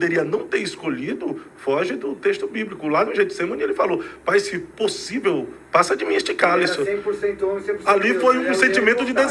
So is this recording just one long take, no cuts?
yes; 0 cuts

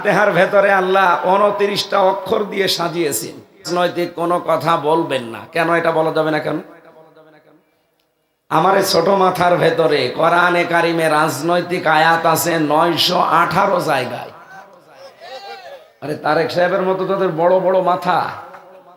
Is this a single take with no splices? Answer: no; 1 cut; at 3.7 s

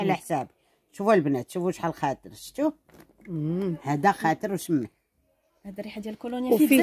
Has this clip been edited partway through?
no; 0 cuts

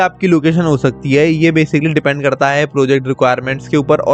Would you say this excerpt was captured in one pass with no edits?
yes; 0 cuts

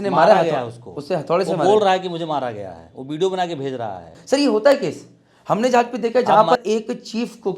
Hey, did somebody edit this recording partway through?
yes; 2 cuts; at 4.2 s, 6.6 s

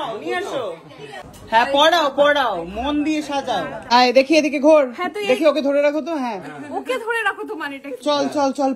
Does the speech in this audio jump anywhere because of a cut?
no; 0 cuts

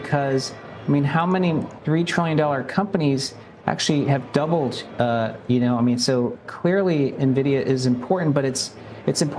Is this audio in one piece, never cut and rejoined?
no; 1 cut; at 1.7 s

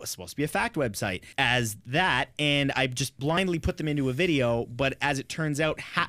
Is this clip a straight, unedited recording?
no; 2 cuts; at 1.2 s, 3.4 s

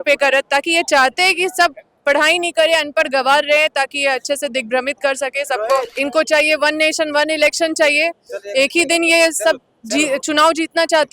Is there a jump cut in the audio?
yes; 1 cut; at 5.9 s

